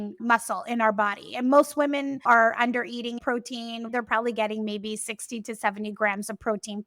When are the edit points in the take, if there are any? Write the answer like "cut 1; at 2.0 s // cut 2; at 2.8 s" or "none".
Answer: cut 1; at 2.1 s // cut 2; at 3.4 s